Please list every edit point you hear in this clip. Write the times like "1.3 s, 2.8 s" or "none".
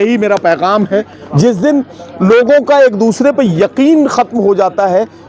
1.2 s